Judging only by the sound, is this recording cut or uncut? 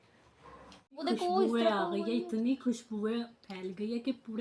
cut